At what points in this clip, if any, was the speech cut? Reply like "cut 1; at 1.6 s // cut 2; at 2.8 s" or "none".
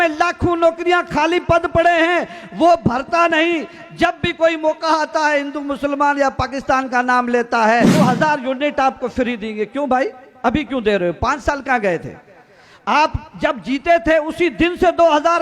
cut 1; at 7.9 s